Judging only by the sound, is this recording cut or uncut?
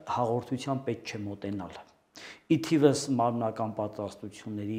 uncut